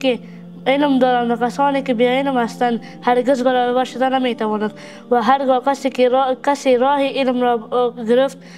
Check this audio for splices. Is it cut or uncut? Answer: uncut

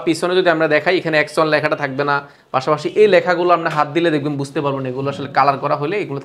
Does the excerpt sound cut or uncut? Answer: uncut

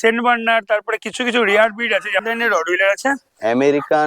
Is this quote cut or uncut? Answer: cut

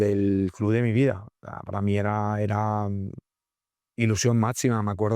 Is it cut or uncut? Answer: uncut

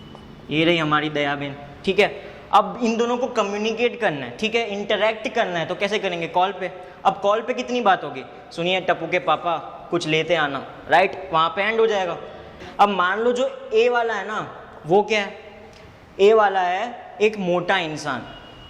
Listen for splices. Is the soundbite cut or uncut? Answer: cut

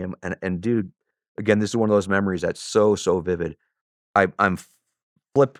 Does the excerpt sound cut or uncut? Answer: uncut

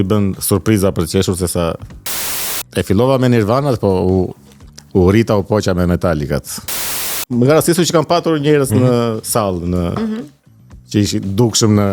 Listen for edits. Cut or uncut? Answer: cut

